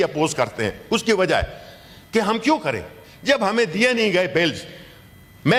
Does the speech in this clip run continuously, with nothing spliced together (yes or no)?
yes